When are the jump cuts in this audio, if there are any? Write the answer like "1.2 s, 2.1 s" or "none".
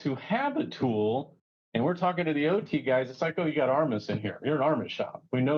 none